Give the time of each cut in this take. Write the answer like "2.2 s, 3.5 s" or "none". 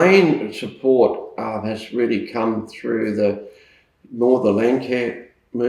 none